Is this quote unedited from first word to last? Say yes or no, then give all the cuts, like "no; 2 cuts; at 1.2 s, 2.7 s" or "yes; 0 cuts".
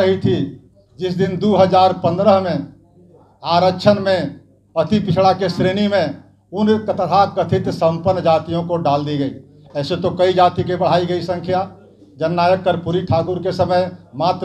yes; 0 cuts